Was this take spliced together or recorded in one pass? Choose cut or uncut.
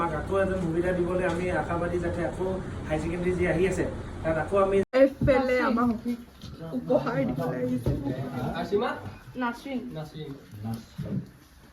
cut